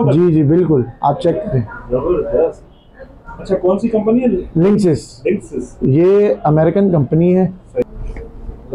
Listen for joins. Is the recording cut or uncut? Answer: cut